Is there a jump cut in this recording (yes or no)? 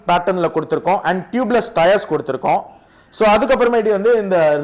no